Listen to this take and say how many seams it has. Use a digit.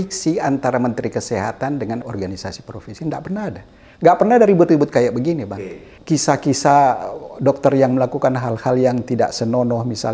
2